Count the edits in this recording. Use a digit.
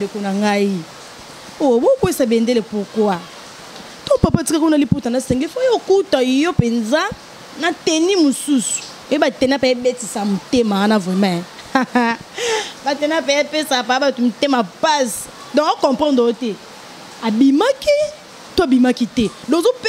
0